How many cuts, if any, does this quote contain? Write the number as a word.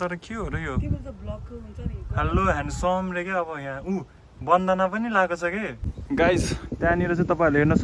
one